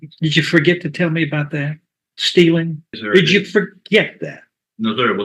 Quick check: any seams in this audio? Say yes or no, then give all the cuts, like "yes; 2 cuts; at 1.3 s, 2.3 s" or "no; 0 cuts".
yes; 1 cut; at 2.8 s